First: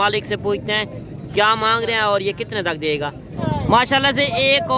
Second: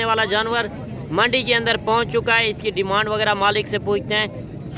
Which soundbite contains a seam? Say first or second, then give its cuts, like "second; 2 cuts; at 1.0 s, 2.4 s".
first; 1 cut; at 3.3 s